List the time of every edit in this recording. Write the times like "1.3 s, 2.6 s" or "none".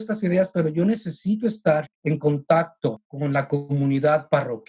1.9 s, 3.1 s